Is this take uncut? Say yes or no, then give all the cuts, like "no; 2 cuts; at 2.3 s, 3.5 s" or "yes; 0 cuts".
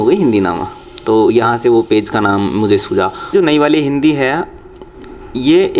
no; 1 cut; at 3.3 s